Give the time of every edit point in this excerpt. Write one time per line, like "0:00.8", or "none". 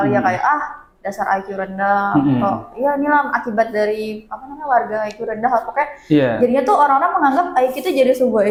none

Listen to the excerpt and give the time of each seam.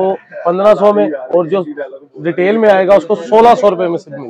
none

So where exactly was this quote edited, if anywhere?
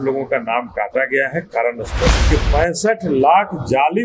0:02.2

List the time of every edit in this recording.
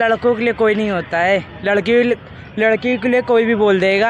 none

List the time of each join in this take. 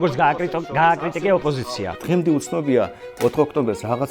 0:01.9

